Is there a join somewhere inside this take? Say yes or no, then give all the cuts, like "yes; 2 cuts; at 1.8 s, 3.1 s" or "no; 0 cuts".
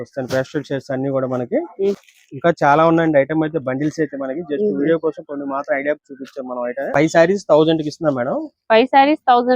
yes; 2 cuts; at 2.0 s, 6.9 s